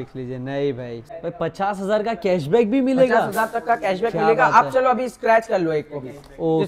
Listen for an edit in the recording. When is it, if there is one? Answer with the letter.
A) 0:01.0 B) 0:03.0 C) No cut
A